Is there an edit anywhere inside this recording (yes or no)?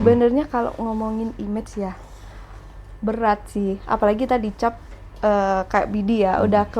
no